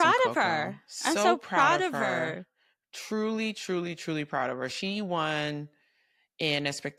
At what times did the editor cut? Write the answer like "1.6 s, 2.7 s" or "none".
none